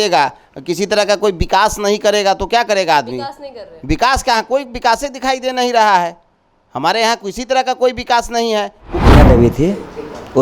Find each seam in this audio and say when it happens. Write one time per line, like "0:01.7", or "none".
0:09.1

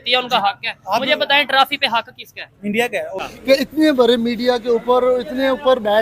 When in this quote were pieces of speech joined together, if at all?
0:03.3

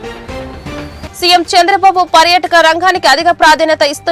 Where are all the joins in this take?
none

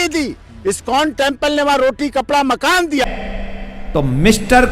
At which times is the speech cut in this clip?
0:03.0

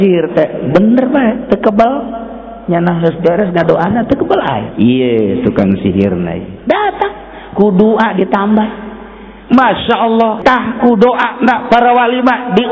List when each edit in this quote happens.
0:10.4

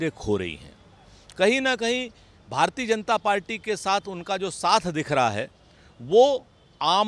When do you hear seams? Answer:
none

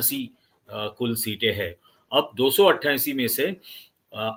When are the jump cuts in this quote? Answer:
none

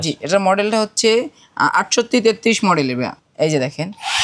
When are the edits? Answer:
0:03.2

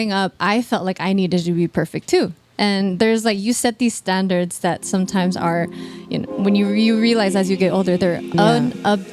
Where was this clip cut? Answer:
0:08.1

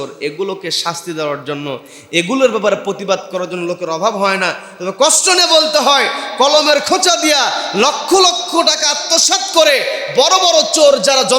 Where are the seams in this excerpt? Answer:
none

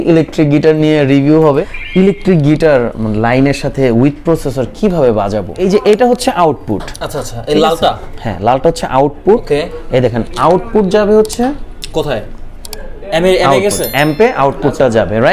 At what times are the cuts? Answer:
0:01.4
0:05.6

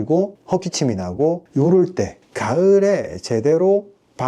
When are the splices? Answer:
0:02.2

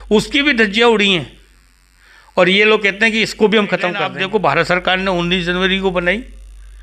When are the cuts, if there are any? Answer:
0:04.1

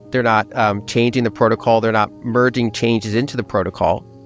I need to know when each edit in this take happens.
none

